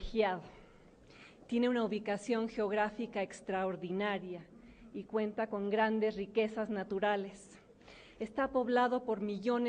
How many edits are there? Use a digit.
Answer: 1